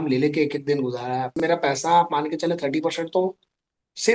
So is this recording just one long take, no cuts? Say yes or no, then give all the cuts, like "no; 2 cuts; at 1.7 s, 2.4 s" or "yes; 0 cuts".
no; 1 cut; at 1.3 s